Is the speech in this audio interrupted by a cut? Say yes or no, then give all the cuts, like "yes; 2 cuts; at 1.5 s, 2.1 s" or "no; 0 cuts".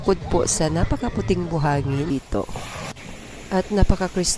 yes; 1 cut; at 2.1 s